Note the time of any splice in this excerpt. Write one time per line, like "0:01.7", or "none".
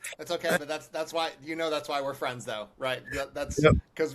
none